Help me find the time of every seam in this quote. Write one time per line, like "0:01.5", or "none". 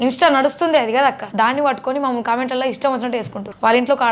0:01.3